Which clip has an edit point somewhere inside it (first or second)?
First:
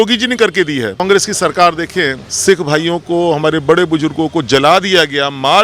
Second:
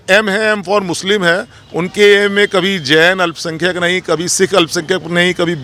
first